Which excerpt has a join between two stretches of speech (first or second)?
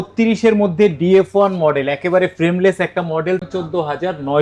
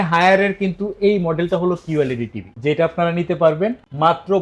first